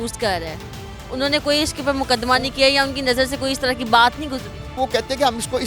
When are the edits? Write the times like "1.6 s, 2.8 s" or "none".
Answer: none